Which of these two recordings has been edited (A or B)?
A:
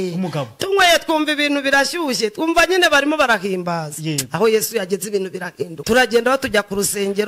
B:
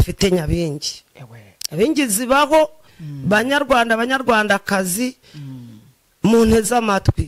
A